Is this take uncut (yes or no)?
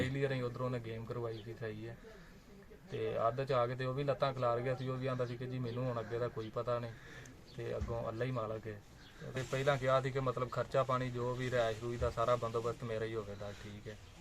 no